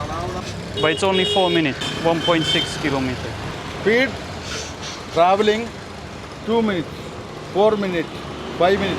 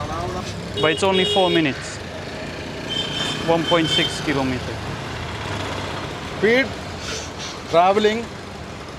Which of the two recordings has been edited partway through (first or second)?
first